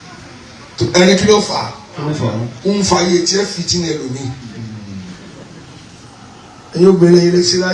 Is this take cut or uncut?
cut